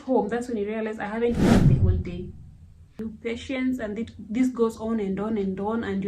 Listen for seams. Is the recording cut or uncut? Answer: cut